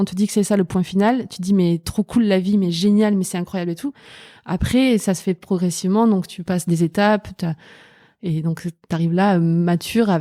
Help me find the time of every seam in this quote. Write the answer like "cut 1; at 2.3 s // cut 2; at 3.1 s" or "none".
none